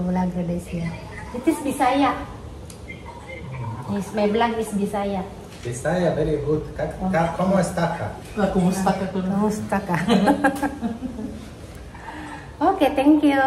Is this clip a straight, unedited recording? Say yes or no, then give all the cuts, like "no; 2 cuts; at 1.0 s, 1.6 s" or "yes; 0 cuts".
yes; 0 cuts